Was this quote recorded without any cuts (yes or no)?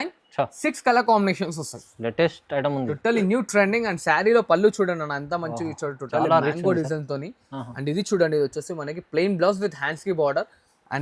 yes